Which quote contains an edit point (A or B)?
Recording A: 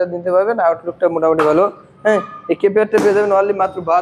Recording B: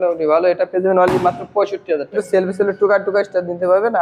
B